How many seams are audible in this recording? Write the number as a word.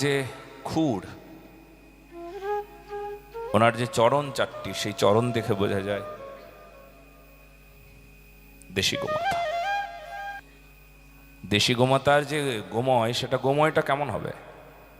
one